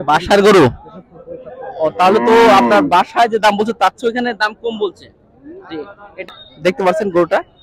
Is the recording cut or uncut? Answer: cut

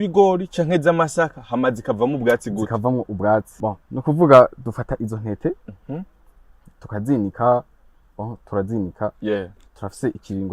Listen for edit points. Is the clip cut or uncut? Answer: cut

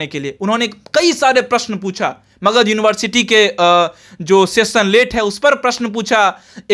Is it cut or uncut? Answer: uncut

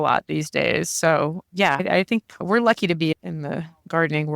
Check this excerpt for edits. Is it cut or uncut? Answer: cut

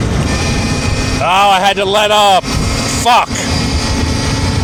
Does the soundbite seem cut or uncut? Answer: uncut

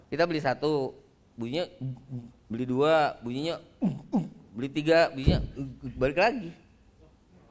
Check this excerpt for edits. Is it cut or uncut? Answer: uncut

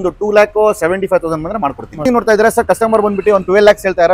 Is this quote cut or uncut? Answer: cut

